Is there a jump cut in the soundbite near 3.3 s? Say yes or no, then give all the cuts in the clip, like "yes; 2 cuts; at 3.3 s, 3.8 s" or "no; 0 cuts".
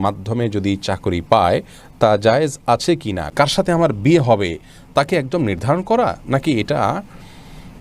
yes; 1 cut; at 3.3 s